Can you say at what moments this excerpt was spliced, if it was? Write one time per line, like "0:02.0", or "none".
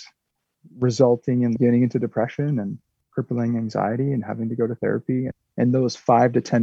0:05.5